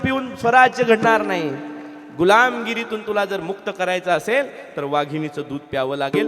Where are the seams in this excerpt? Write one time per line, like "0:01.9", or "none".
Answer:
none